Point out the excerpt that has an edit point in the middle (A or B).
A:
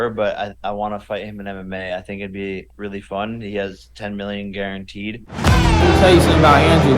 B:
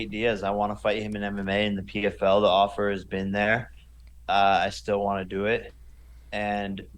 A